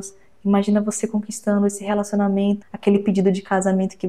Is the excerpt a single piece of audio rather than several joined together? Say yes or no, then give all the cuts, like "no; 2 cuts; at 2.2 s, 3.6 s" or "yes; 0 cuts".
no; 1 cut; at 2.7 s